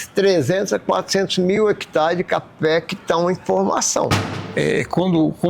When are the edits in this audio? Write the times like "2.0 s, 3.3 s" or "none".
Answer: 4.2 s